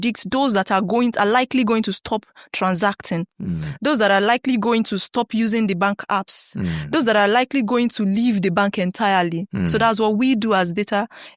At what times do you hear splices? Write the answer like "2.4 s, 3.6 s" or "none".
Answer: none